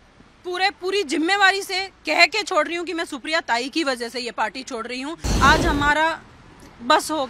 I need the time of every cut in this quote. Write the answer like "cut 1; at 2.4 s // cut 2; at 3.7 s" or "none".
cut 1; at 5.3 s